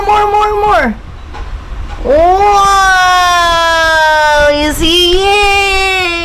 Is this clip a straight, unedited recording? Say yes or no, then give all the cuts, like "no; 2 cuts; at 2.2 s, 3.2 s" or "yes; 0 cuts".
yes; 0 cuts